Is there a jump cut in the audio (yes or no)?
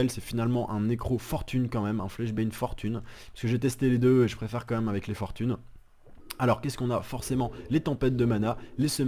yes